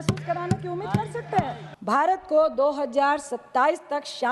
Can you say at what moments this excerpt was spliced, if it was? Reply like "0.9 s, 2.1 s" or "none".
1.6 s